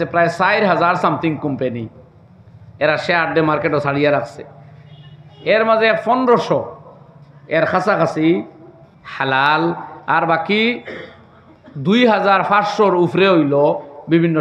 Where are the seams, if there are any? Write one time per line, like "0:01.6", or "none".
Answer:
none